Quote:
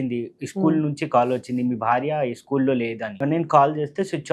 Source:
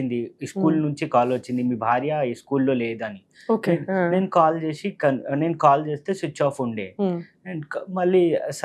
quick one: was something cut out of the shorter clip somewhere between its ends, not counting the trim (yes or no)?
yes